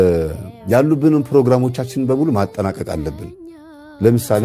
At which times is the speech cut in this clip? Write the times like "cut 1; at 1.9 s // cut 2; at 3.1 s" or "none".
none